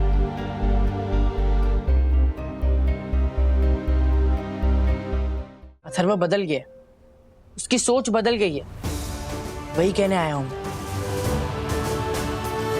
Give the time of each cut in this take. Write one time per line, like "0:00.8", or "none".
0:05.8